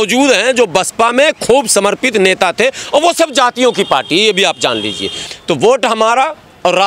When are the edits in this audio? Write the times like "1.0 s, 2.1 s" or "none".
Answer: 5.2 s